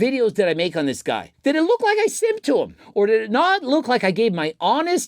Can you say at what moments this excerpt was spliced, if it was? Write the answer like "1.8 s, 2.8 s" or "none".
1.3 s, 2.8 s